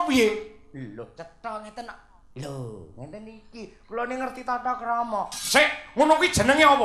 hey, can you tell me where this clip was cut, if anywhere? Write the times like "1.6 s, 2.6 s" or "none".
none